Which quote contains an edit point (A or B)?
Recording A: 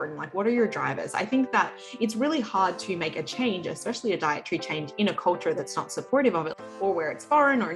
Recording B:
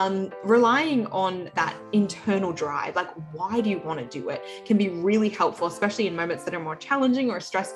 A